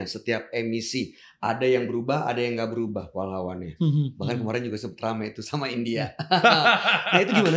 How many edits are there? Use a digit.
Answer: 0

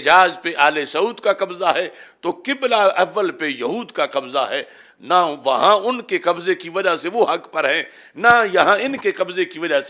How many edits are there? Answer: 0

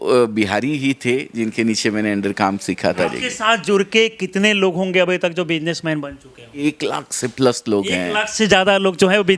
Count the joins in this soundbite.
2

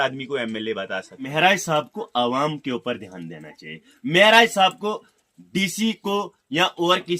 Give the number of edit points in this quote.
1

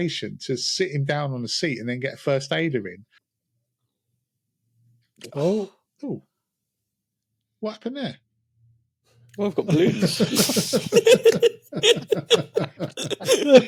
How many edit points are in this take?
0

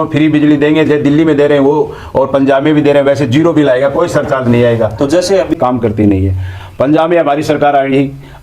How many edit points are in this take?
1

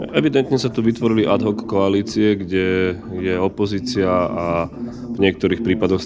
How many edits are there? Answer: 0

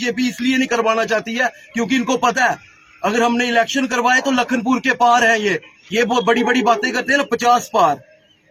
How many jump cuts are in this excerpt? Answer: 0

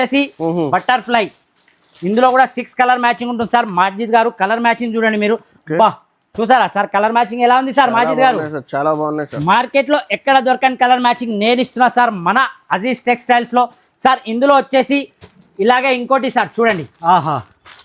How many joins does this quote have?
0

